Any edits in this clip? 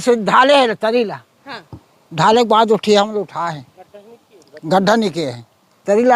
no; 0 cuts

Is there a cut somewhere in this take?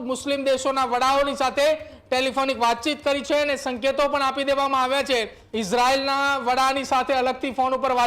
yes; 1 cut; at 5.4 s

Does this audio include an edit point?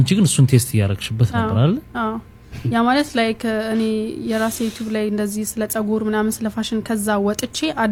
no; 0 cuts

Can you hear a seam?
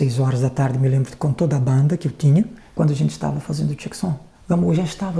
yes; 2 cuts; at 2.6 s, 4.3 s

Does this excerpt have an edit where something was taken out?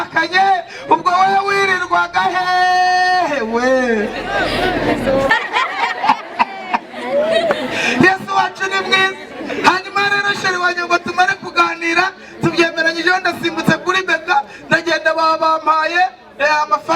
yes; 1 cut; at 5.3 s

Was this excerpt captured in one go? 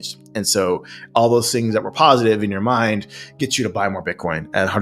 yes; 0 cuts

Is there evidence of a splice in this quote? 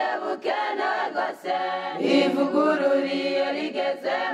no; 0 cuts

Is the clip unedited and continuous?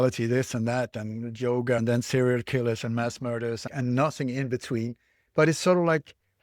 no; 3 cuts; at 1.8 s, 3.7 s, 5.2 s

